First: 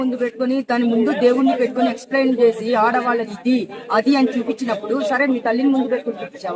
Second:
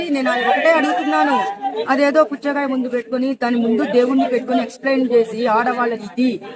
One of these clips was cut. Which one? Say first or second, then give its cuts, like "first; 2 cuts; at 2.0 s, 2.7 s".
second; 1 cut; at 1.7 s